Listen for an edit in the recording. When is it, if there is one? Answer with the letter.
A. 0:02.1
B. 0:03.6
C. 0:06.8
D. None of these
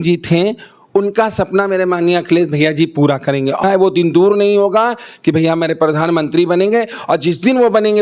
B